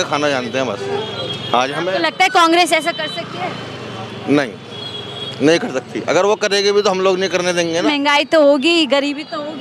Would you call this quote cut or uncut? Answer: cut